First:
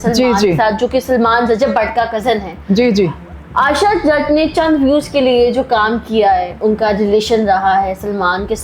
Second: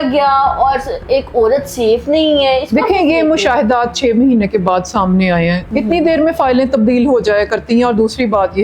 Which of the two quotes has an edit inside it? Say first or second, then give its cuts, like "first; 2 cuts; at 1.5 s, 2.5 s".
first; 1 cut; at 6.5 s